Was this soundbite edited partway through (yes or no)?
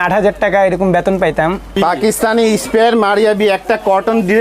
yes